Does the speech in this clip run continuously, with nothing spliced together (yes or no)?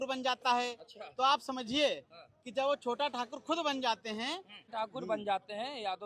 no